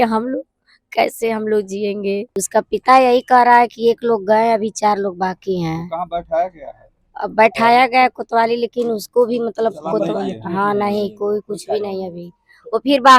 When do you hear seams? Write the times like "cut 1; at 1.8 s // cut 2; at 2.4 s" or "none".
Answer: cut 1; at 2.3 s

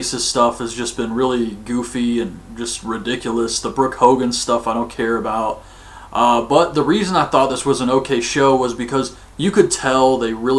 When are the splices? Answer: cut 1; at 4.4 s

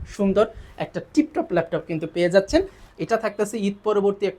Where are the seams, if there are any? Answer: cut 1; at 2.8 s

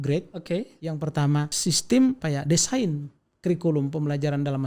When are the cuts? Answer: cut 1; at 1.5 s // cut 2; at 2.2 s

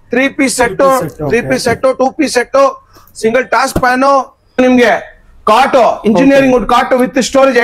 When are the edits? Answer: cut 1; at 4.6 s

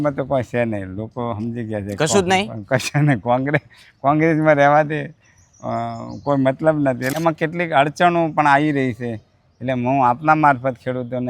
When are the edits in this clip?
cut 1; at 7.1 s

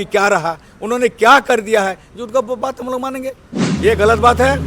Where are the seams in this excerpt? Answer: cut 1; at 3.7 s

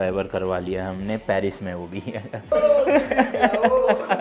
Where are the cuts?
cut 1; at 2.5 s

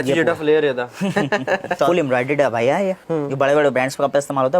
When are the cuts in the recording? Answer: cut 1; at 1.8 s // cut 2; at 3.0 s

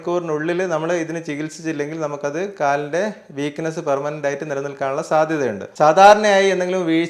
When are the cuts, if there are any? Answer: cut 1; at 5.6 s

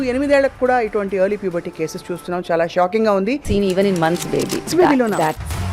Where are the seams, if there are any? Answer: cut 1; at 3.4 s // cut 2; at 4.7 s

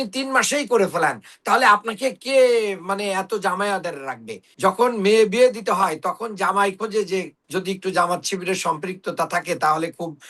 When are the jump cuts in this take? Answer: cut 1; at 4.4 s // cut 2; at 7.4 s

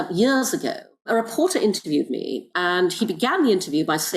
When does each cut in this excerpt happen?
cut 1; at 1.1 s // cut 2; at 2.5 s

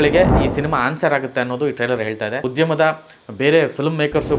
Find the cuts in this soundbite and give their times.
cut 1; at 2.4 s

